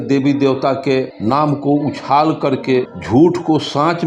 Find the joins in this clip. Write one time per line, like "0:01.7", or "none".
0:01.1
0:03.0

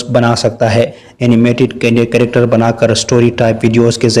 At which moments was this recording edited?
0:01.0

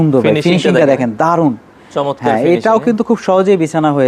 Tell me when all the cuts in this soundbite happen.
none

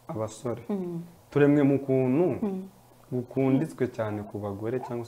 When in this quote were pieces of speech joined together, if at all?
0:01.1

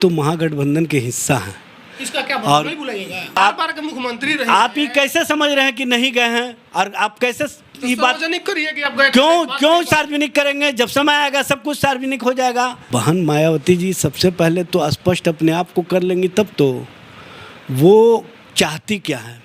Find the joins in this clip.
0:03.4
0:12.8

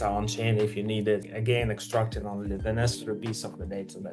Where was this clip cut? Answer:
none

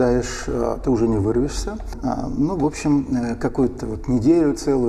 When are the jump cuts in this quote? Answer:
none

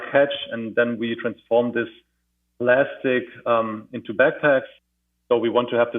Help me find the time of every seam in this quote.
0:04.9

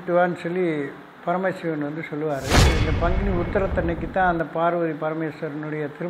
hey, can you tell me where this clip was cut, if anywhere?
0:02.8

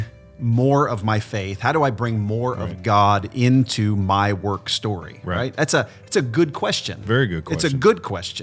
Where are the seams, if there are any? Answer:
none

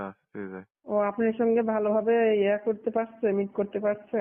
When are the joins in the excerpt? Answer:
0:00.9

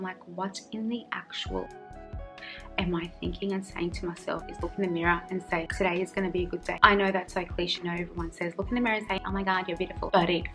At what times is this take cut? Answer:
0:04.5
0:07.8

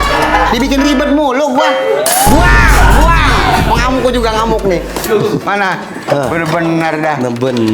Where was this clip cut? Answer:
none

